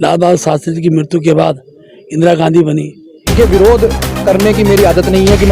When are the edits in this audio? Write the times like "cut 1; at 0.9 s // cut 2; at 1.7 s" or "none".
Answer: cut 1; at 3.3 s